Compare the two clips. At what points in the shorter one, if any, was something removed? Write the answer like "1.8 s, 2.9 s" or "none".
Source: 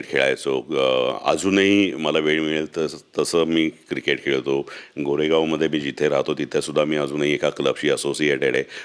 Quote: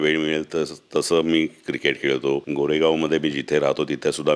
2.5 s